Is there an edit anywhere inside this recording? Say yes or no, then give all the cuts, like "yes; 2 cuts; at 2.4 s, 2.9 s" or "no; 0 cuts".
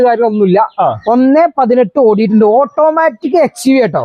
no; 0 cuts